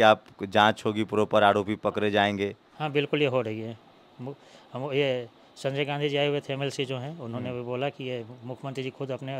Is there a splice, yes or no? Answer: no